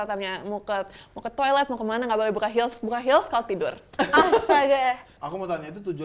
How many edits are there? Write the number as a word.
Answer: one